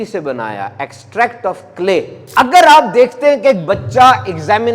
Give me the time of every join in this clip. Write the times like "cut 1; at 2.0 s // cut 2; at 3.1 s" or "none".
cut 1; at 2.2 s

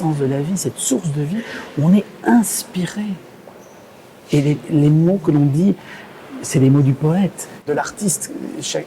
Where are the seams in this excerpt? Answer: cut 1; at 7.7 s

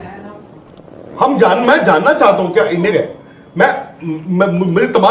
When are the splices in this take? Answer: cut 1; at 2.9 s

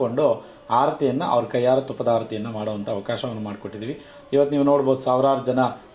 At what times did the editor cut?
none

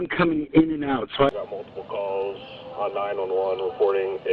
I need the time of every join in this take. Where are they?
cut 1; at 1.3 s

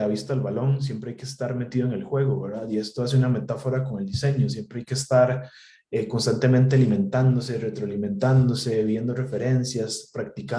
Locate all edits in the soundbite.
none

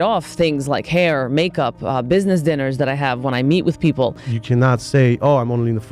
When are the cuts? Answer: cut 1; at 4.3 s

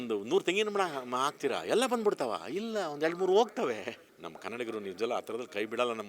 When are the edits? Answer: cut 1; at 4.0 s

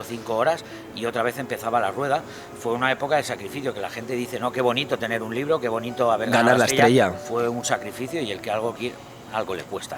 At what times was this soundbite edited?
none

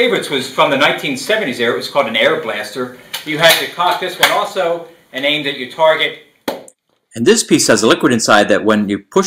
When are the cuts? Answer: cut 1; at 1.8 s

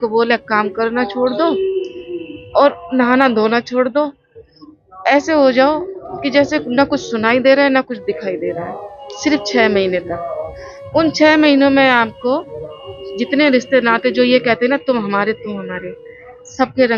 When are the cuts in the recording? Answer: none

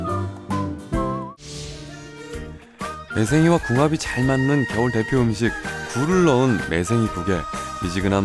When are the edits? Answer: cut 1; at 1.4 s

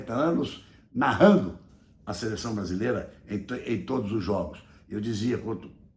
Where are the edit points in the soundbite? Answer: none

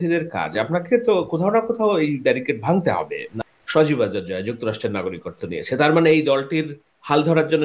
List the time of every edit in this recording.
cut 1; at 3.3 s

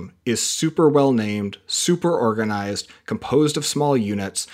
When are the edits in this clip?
none

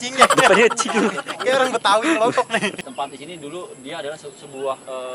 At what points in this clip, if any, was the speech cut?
cut 1; at 2.7 s

